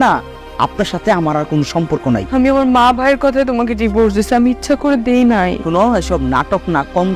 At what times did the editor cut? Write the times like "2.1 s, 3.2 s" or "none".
2.3 s, 5.6 s